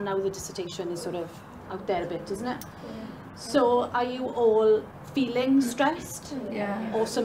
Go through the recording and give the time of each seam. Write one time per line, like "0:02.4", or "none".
0:04.9